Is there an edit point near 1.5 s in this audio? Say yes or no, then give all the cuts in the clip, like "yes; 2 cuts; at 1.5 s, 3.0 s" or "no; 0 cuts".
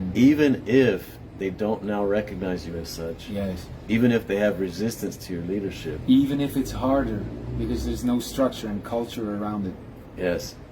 no; 0 cuts